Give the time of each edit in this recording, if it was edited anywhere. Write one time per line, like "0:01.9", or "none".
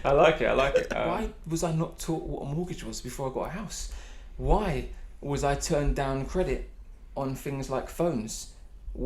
0:00.9